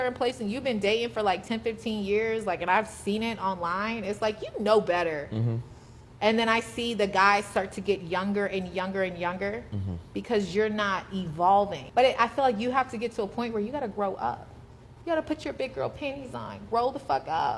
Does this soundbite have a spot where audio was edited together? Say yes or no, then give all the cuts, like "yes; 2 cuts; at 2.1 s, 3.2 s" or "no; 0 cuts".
yes; 1 cut; at 11.8 s